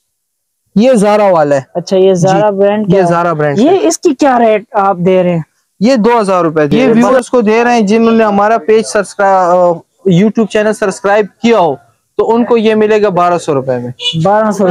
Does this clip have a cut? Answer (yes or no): yes